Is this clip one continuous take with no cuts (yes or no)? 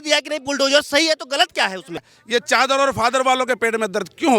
no